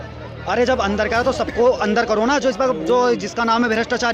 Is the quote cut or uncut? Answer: uncut